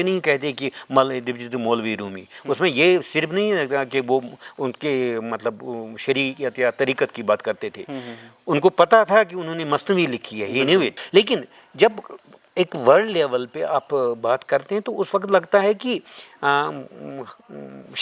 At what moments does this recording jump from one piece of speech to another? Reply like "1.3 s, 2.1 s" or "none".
11.0 s